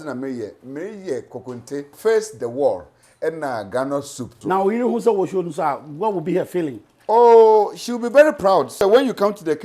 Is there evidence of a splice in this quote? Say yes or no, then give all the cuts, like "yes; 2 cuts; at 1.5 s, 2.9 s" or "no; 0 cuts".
yes; 3 cuts; at 1.9 s, 4.4 s, 8.8 s